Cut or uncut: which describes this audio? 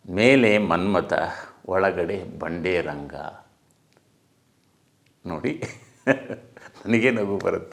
uncut